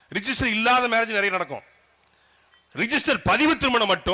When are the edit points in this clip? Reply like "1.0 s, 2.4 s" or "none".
none